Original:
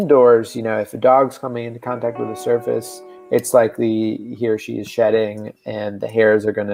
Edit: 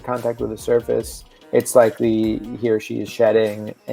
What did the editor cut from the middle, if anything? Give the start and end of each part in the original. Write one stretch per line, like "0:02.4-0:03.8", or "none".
none